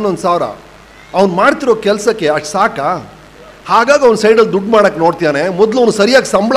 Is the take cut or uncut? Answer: uncut